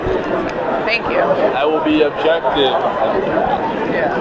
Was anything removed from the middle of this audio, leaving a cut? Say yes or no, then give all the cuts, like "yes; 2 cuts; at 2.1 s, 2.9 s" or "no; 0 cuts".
no; 0 cuts